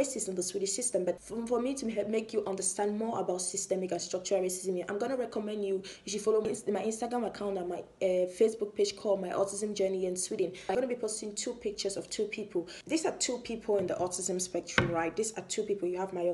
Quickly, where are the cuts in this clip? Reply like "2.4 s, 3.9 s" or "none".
1.2 s, 10.7 s, 12.8 s